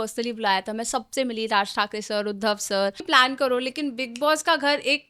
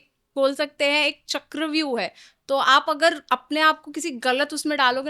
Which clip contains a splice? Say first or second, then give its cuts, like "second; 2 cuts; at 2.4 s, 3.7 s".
first; 1 cut; at 3.1 s